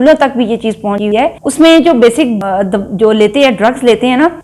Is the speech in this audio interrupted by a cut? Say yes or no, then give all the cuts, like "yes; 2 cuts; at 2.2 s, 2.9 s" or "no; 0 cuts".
yes; 2 cuts; at 1.1 s, 2.4 s